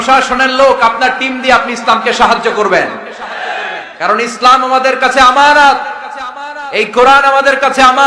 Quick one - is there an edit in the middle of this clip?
no; 0 cuts

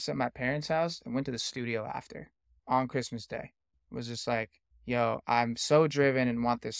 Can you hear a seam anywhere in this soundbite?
yes; 3 cuts; at 2.6 s, 3.7 s, 4.7 s

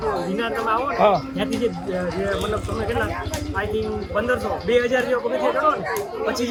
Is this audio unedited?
yes; 0 cuts

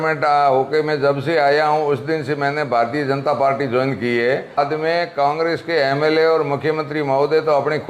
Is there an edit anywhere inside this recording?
yes; 1 cut; at 4.6 s

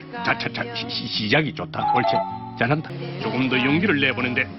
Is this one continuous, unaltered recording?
no; 1 cut; at 3.0 s

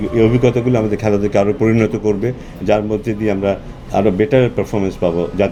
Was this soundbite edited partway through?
no; 0 cuts

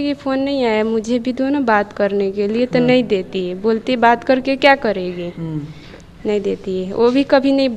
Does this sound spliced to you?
no; 0 cuts

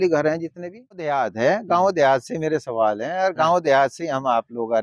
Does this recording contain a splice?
yes; 1 cut; at 1.1 s

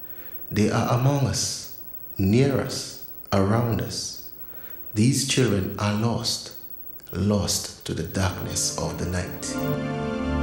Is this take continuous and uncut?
no; 1 cut; at 9.5 s

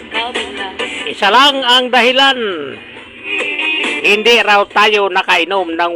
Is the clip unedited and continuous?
yes; 0 cuts

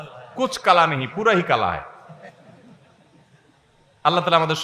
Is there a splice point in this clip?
no; 0 cuts

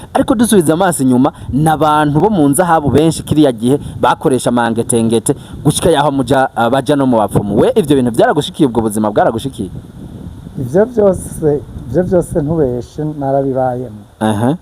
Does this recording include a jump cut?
no; 0 cuts

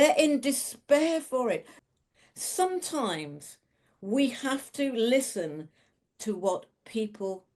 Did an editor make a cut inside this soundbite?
yes; 1 cut; at 1.7 s

